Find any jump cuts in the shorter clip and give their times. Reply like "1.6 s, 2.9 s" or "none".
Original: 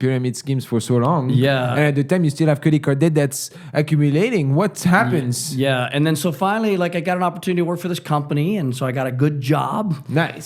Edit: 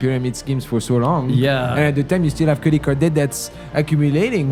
none